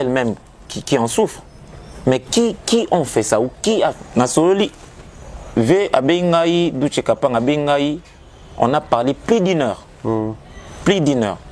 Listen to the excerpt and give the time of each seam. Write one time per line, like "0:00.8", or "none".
0:04.0